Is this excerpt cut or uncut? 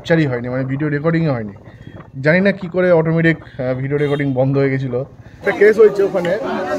cut